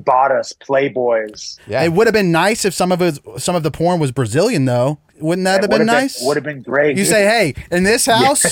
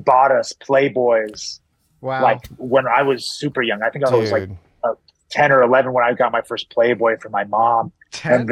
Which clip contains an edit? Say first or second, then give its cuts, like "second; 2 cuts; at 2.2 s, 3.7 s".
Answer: first; 3 cuts; at 1.6 s, 5.1 s, 6.9 s